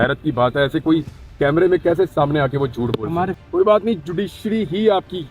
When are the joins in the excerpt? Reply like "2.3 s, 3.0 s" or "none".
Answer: none